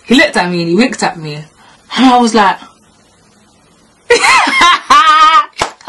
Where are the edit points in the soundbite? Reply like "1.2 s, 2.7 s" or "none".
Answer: none